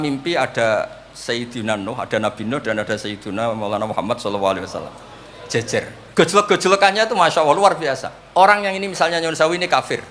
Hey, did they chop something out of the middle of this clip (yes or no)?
yes